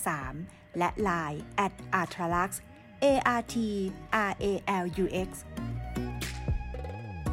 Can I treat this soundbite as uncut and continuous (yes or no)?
no